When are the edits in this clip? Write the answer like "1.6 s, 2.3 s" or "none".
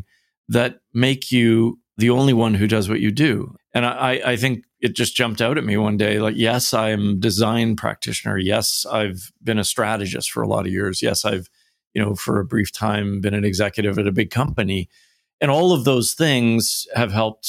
1.9 s, 3.5 s